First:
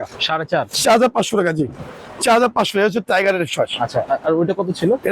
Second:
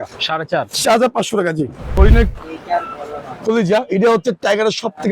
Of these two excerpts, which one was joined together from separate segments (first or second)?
second